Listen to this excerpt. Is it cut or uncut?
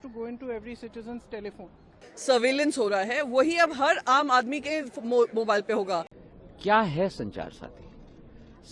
cut